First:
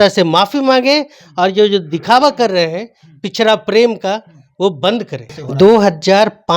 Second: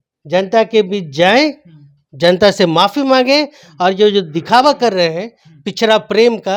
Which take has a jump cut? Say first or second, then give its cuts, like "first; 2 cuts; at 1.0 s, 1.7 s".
first; 1 cut; at 5.4 s